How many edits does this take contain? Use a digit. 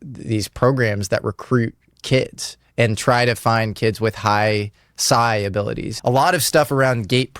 1